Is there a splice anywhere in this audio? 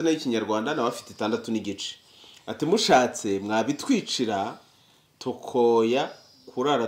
no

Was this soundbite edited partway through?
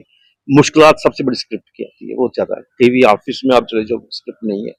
no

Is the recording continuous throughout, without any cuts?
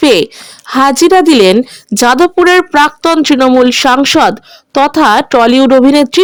yes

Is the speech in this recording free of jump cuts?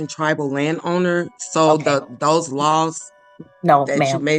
yes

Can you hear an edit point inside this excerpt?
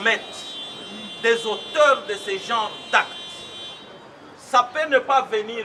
no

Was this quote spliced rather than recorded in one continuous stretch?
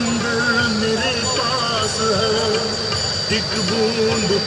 no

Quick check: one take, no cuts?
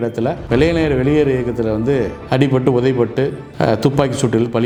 yes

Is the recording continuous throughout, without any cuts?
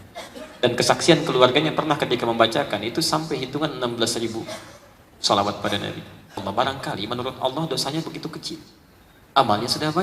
no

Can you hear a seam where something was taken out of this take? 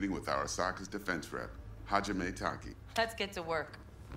yes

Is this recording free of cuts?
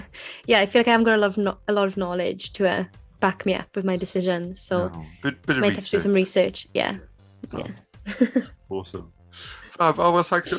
yes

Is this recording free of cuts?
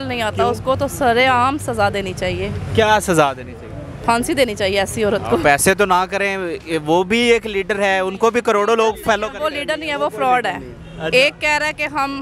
yes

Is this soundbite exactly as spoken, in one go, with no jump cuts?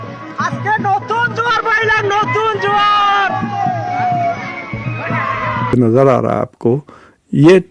no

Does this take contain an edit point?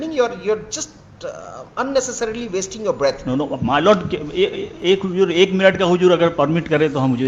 no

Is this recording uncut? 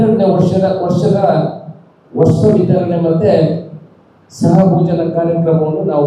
yes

